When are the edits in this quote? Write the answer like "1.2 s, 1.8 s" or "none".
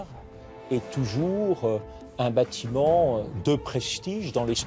none